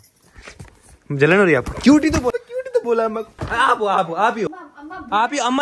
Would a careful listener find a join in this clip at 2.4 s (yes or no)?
yes